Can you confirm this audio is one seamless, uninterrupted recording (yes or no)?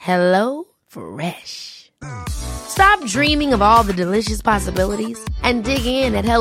yes